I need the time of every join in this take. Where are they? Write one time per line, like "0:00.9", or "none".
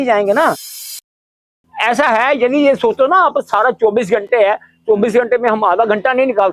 0:01.1